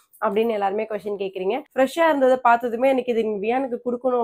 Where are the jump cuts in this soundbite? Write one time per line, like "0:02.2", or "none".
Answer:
0:01.7